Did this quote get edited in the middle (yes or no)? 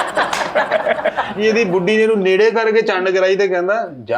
yes